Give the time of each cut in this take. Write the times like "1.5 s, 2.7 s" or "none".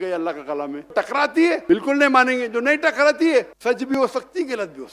0.9 s, 1.6 s, 3.5 s